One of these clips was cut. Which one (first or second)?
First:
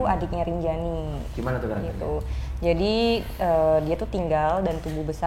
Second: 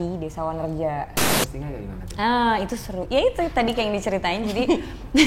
second